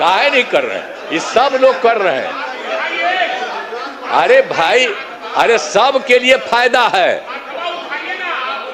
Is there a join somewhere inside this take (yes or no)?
no